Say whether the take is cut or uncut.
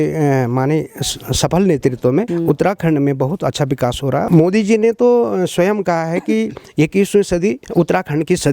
cut